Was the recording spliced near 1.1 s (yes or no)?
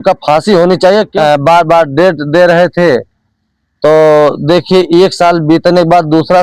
yes